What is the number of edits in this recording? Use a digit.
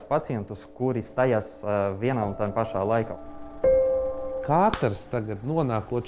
2